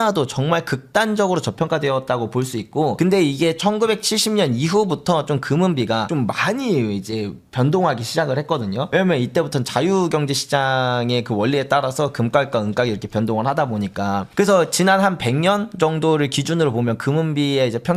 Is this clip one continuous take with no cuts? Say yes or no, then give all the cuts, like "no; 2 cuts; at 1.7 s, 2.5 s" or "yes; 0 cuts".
yes; 0 cuts